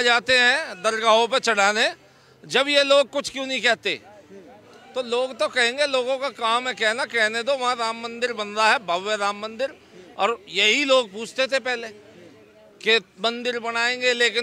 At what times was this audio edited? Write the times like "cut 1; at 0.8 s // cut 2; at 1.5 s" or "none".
none